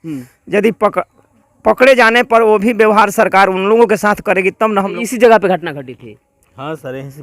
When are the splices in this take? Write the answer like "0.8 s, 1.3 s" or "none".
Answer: 5.0 s